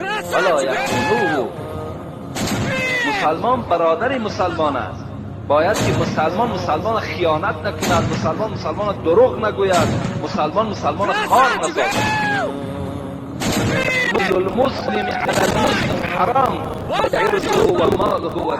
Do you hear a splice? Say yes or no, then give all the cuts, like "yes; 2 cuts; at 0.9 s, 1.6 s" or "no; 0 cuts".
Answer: no; 0 cuts